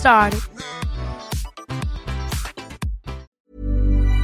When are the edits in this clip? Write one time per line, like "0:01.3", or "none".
0:03.3